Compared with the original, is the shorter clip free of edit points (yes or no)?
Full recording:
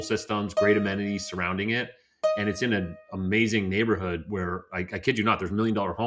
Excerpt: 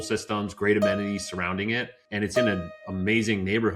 no